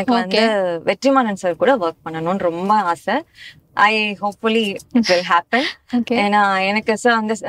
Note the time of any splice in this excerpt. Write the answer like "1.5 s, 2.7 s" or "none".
none

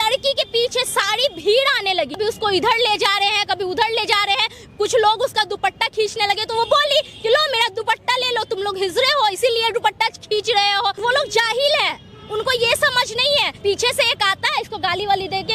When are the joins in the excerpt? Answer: 2.2 s, 11.0 s, 13.5 s

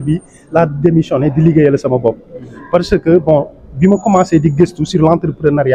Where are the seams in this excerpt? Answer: none

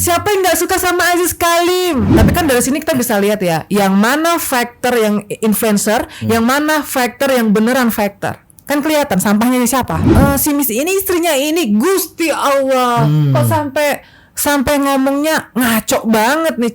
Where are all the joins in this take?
2.1 s, 10.0 s

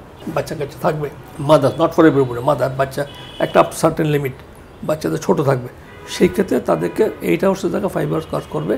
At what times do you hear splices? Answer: 1.3 s

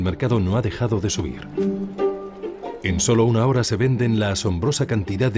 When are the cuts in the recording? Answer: 2.7 s

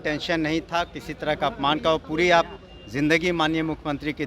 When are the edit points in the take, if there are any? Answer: none

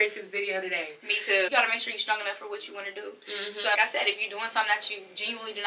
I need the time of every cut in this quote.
1.5 s, 3.8 s

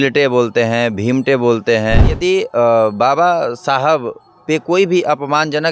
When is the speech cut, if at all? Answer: 2.1 s

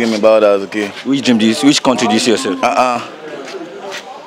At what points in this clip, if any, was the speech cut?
none

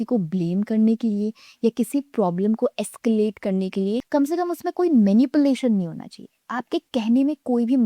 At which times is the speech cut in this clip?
4.0 s

